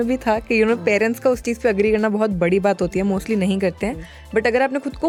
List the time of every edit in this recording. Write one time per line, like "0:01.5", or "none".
none

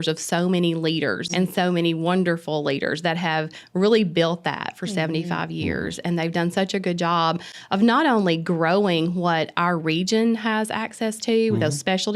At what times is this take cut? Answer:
0:01.2

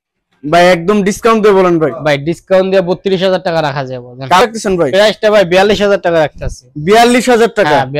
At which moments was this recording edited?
0:04.4

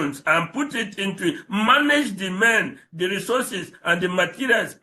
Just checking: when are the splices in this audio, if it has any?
none

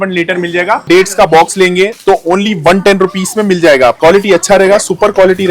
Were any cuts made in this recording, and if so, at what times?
0:00.8
0:04.0

